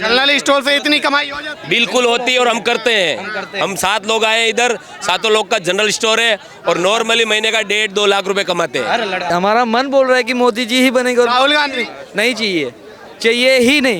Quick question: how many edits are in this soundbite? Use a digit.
1